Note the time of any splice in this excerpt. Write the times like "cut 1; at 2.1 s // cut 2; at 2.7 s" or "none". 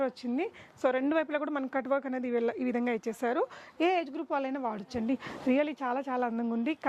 none